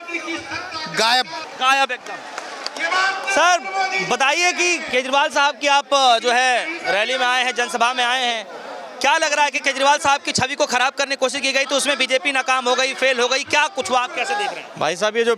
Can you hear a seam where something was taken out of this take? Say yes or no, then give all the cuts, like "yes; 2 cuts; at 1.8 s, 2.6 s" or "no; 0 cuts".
no; 0 cuts